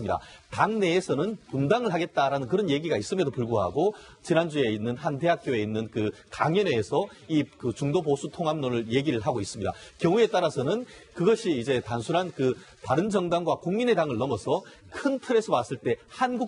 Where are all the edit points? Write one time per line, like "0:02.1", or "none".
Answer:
0:10.3